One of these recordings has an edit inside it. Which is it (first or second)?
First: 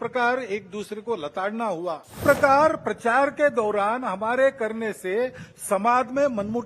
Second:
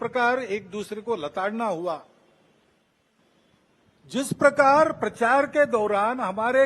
first